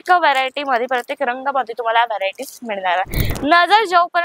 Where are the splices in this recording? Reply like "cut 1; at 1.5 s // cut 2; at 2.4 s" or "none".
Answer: cut 1; at 3.2 s